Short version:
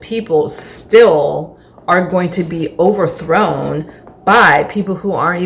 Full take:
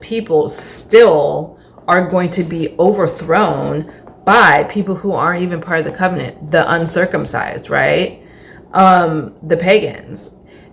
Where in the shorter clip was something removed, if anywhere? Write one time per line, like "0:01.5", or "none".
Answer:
none